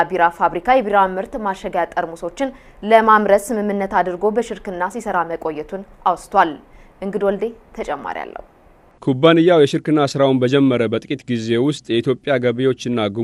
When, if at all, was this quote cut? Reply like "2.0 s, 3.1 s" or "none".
none

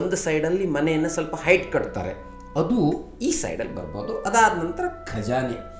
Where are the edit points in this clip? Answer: none

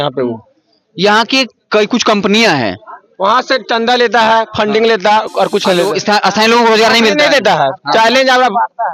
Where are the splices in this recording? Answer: none

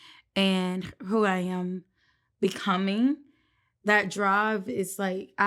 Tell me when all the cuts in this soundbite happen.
none

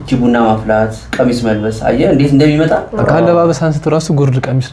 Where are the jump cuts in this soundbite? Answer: none

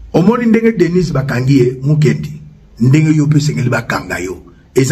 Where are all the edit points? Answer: none

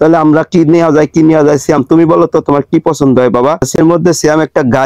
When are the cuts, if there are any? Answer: 3.8 s

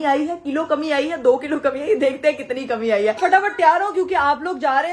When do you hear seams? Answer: 3.2 s

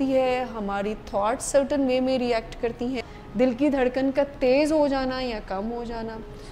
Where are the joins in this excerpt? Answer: 3.0 s

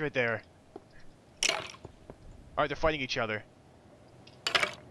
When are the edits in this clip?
none

